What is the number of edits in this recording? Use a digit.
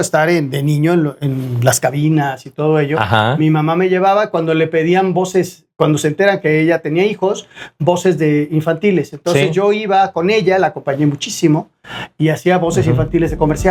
0